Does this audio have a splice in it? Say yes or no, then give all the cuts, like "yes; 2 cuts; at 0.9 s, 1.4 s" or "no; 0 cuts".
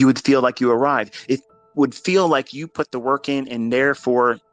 no; 0 cuts